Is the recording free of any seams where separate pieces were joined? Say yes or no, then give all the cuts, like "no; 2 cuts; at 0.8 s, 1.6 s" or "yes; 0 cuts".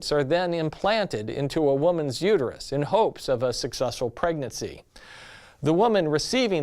no; 1 cut; at 0.9 s